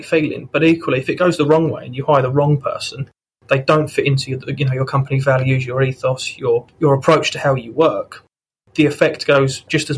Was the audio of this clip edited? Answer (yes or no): no